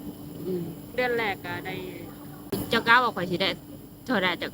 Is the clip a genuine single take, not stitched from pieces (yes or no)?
no